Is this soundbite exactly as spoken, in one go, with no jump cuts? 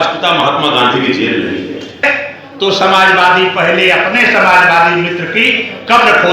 no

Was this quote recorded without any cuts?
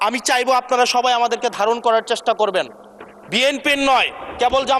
yes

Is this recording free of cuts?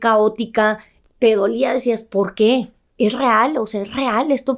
no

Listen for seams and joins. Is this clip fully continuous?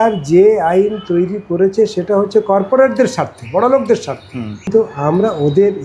no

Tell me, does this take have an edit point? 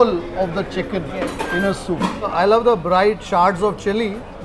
yes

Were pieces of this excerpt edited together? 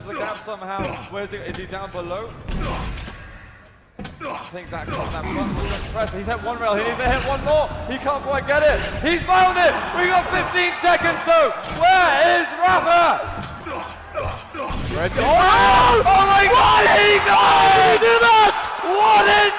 yes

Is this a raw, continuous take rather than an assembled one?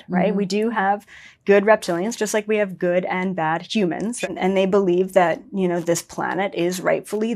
no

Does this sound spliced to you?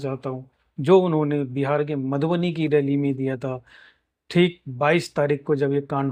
no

